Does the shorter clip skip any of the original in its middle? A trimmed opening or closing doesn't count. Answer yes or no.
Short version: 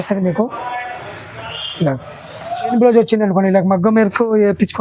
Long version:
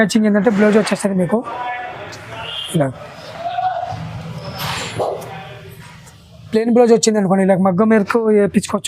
yes